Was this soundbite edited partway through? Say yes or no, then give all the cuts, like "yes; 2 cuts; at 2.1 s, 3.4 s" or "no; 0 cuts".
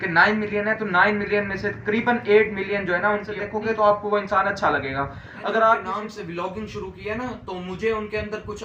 yes; 2 cuts; at 3.5 s, 5.9 s